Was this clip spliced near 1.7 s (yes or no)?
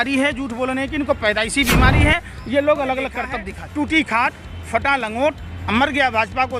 no